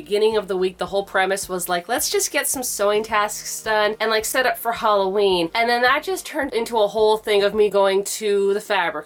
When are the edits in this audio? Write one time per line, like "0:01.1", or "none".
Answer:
none